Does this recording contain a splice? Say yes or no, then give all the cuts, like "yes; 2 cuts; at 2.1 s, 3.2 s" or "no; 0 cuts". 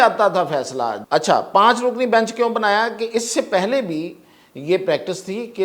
yes; 1 cut; at 1.0 s